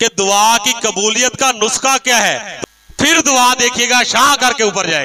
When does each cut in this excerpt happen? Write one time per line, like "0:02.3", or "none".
0:02.5